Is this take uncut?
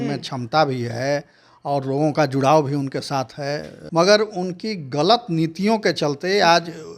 no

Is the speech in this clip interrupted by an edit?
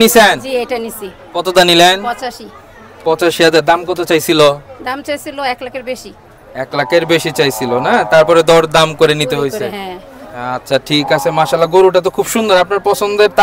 no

